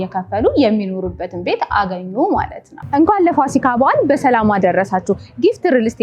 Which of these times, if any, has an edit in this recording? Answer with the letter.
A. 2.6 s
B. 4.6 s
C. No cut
A